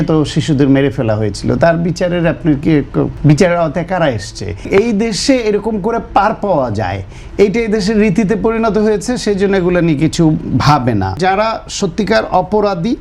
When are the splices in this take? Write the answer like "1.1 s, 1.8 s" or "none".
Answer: 3.1 s, 4.7 s, 11.1 s